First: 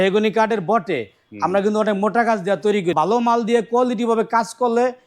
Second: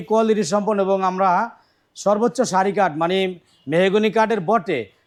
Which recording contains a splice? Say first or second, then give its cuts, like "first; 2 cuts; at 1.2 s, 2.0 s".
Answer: first; 1 cut; at 2.9 s